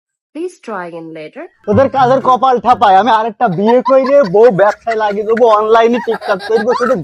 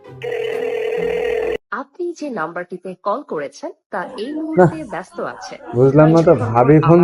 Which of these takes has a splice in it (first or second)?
first